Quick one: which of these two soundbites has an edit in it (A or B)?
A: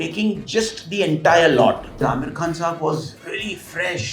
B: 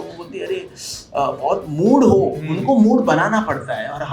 A